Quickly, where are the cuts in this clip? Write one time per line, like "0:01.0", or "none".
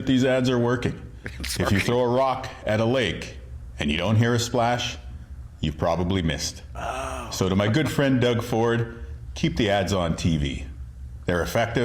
none